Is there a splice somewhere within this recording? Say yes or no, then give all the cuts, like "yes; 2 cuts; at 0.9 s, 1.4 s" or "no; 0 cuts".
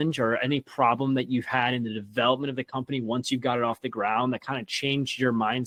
no; 0 cuts